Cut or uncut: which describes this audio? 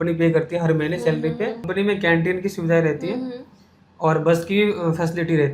cut